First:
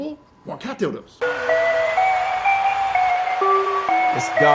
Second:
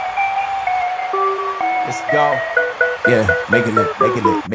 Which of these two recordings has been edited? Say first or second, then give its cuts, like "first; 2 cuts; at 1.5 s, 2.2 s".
first; 1 cut; at 1.1 s